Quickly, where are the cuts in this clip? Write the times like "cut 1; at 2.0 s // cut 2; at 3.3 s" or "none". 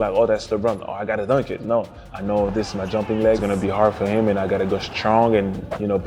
cut 1; at 2.0 s // cut 2; at 3.4 s